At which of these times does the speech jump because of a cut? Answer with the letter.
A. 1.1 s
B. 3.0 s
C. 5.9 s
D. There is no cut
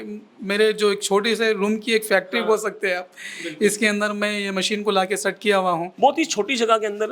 C